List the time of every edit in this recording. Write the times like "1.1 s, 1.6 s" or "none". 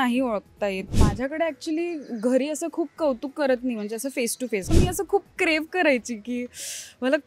0.9 s, 4.7 s